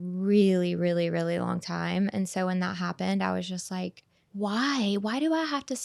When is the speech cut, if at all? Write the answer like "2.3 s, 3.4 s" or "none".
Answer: 4.2 s